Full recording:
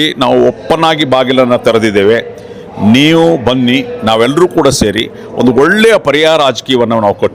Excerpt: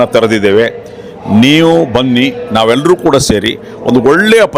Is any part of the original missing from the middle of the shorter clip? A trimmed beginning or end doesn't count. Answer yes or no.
no